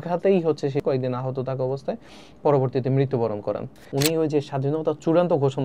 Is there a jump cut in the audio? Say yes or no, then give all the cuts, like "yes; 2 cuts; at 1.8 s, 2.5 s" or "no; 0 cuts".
yes; 2 cuts; at 0.8 s, 3.8 s